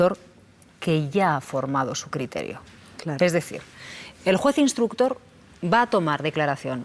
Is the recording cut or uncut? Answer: uncut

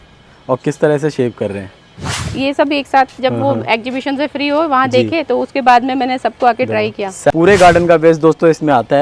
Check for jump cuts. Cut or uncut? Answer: cut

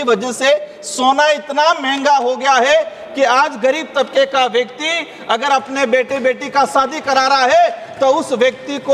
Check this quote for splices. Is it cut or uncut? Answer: uncut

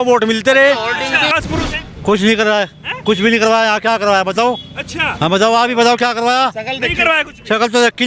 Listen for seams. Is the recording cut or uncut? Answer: cut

